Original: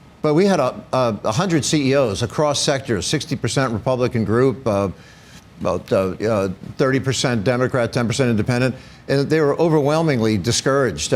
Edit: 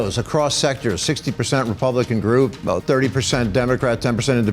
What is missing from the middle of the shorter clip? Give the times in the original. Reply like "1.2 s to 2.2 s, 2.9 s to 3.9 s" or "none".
4.6 s to 6.5 s